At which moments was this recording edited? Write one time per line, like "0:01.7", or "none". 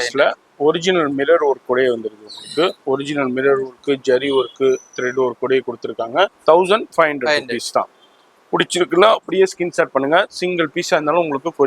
0:02.8
0:06.4